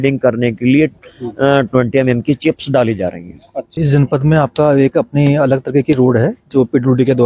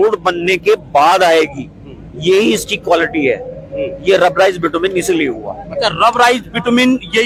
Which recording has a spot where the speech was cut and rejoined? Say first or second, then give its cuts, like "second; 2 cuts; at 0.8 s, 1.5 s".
first; 1 cut; at 3.8 s